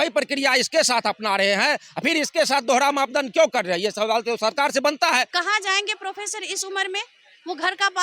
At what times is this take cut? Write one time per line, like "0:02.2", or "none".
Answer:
0:05.3